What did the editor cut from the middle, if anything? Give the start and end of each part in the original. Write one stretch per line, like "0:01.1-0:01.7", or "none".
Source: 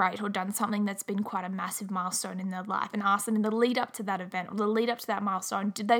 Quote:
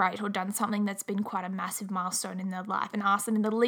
none